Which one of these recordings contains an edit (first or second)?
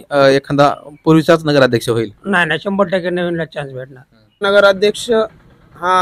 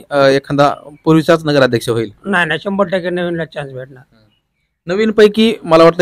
first